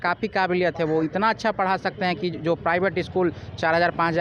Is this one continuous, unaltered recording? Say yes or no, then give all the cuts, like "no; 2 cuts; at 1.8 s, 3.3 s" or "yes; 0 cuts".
yes; 0 cuts